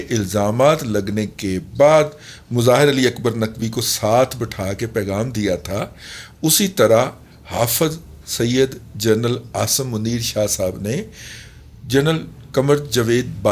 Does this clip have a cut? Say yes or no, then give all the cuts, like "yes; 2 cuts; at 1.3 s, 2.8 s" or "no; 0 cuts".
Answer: no; 0 cuts